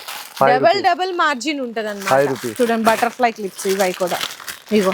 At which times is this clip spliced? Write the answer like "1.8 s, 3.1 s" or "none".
2.5 s